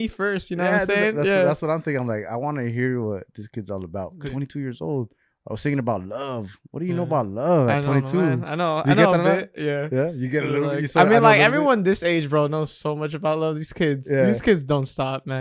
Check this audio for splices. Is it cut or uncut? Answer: cut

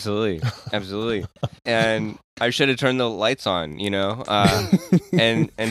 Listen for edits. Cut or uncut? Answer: cut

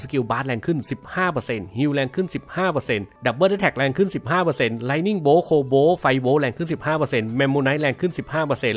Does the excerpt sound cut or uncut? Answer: uncut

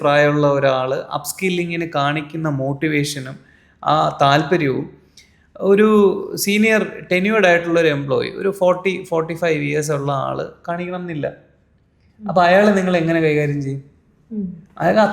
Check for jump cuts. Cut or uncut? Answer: uncut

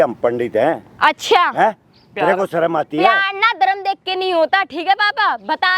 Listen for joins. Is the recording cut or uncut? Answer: uncut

